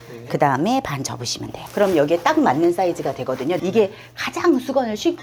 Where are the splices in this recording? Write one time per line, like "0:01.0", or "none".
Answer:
0:03.6